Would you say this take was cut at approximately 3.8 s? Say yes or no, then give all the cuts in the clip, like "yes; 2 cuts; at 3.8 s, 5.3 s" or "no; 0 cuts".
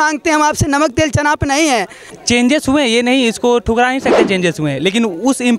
no; 1 cut; at 2.0 s